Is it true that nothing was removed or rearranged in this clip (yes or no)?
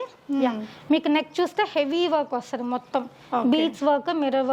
yes